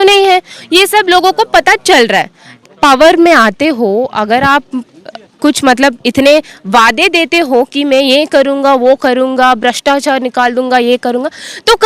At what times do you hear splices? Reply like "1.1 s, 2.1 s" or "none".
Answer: 2.6 s